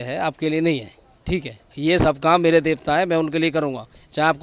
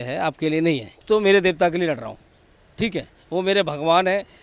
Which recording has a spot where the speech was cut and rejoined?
second; 1 cut; at 1.0 s

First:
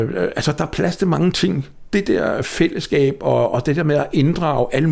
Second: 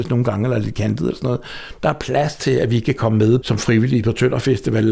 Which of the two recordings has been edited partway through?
second; 1 cut; at 3.4 s

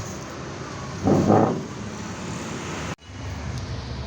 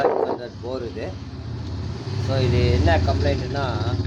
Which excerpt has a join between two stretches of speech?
first; 1 cut; at 3.1 s

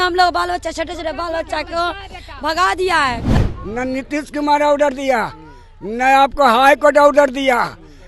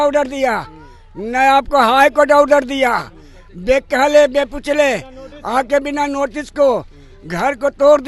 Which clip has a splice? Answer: first; 1 cut; at 3.3 s

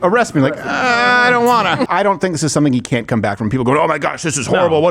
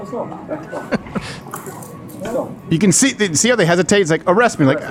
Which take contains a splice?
first; 1 cut; at 1.9 s

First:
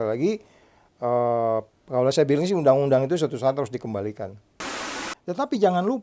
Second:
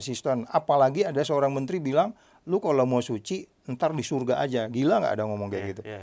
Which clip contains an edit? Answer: first; 1 cut; at 4.8 s

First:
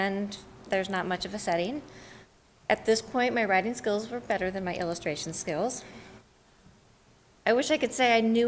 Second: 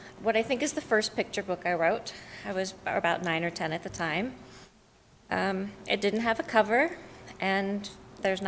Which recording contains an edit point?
second; 1 cut; at 2.3 s

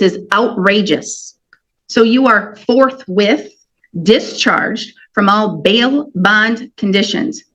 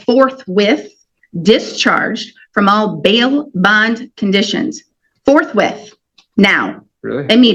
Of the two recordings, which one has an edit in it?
first; 1 cut; at 1.7 s

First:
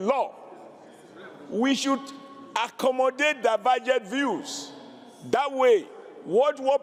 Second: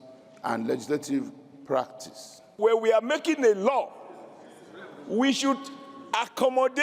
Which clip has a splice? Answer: second; 1 cut; at 2.6 s

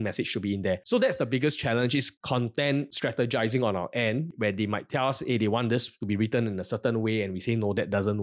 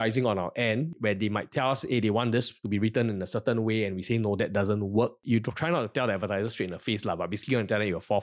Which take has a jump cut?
first; 2 cuts; at 0.8 s, 2.2 s

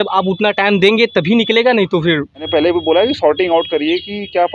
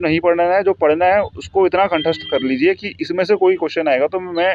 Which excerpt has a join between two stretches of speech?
first; 1 cut; at 2.5 s

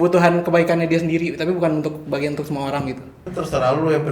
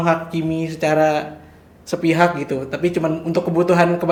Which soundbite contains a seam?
first; 1 cut; at 3.2 s

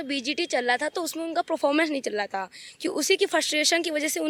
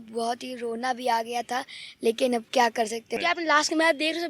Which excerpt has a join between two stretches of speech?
second; 1 cut; at 3.2 s

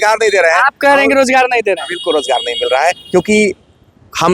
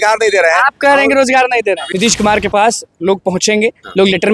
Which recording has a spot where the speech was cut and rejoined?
second; 1 cut; at 1.9 s

